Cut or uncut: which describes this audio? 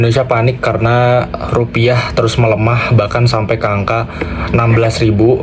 uncut